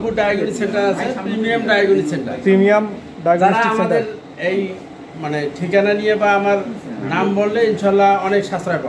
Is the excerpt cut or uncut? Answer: uncut